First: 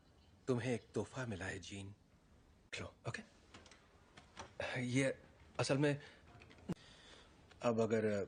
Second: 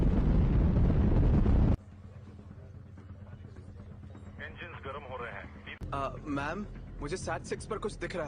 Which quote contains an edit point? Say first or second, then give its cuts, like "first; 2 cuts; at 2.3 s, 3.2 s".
second; 1 cut; at 5.8 s